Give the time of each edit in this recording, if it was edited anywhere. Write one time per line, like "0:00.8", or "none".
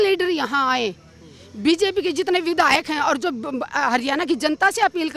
none